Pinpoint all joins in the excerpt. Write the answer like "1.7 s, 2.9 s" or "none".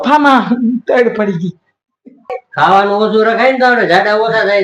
2.4 s